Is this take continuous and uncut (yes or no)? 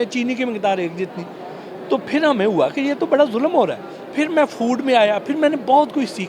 yes